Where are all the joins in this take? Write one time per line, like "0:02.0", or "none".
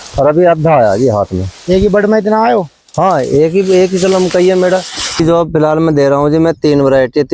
0:05.1